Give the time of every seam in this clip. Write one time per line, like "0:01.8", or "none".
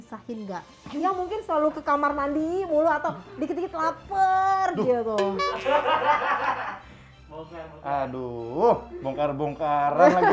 none

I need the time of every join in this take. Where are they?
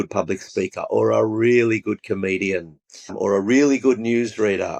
none

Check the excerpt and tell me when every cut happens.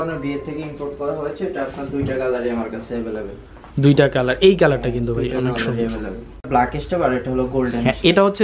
0:06.5

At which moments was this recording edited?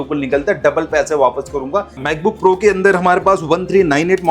0:02.0

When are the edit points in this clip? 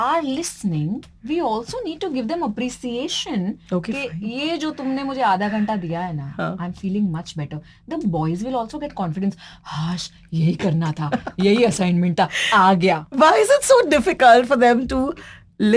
none

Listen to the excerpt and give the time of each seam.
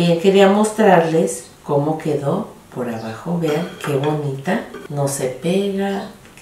0:04.8

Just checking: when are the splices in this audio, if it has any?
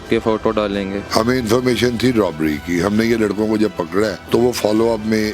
0:01.0
0:04.2

